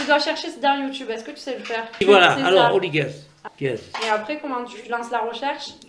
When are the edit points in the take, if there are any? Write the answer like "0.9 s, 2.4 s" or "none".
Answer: 1.9 s, 3.4 s